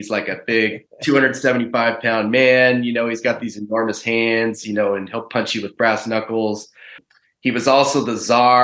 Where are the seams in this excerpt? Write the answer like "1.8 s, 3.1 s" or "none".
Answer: 7.0 s